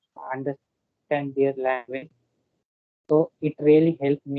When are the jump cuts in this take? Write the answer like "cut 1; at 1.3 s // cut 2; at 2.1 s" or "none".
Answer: none